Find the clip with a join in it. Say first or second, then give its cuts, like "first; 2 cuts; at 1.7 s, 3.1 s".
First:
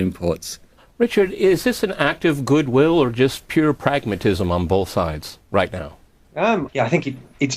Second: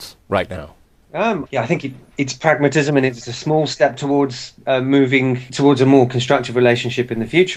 first; 1 cut; at 2.4 s